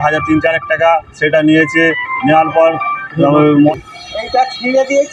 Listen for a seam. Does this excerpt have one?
yes; 1 cut; at 3.8 s

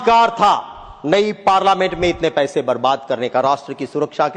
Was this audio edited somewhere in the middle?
no; 0 cuts

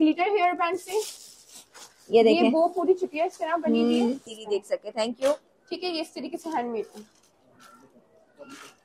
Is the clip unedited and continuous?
no; 1 cut; at 4.3 s

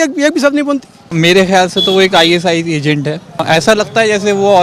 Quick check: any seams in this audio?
yes; 2 cuts; at 1.1 s, 3.4 s

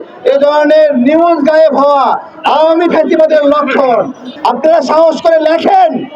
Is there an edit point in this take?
yes; 1 cut; at 4.2 s

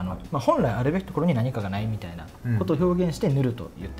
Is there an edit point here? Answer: no; 0 cuts

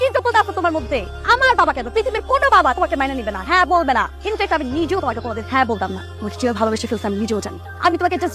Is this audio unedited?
yes; 0 cuts

